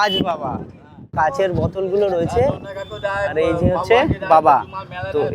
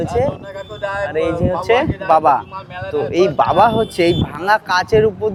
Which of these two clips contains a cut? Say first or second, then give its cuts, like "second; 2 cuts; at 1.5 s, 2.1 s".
first; 1 cut; at 1.1 s